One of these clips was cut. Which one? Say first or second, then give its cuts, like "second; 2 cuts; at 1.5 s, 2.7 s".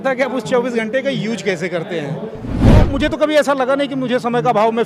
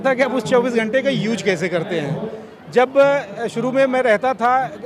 first; 1 cut; at 2.8 s